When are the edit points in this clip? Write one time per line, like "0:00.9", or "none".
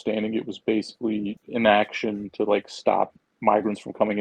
0:01.4